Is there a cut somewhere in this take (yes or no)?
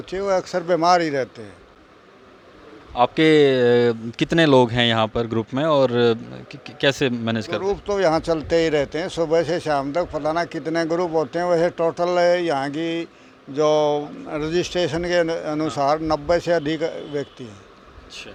no